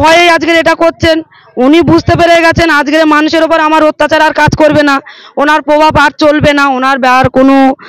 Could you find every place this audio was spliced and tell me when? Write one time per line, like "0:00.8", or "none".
none